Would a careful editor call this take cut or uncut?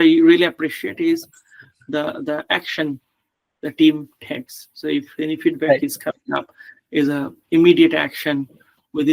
uncut